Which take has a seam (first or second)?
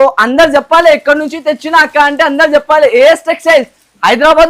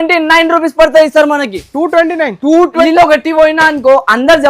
second